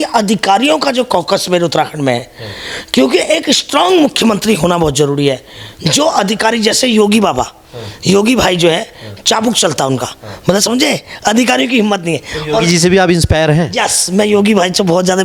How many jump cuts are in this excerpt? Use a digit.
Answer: 0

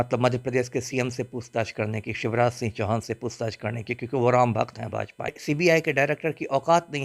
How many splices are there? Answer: 1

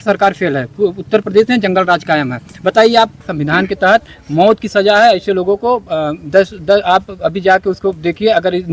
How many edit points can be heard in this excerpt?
1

